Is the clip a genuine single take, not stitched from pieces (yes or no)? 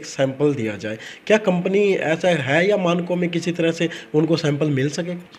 yes